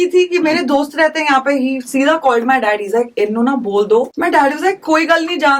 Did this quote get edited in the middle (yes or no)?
yes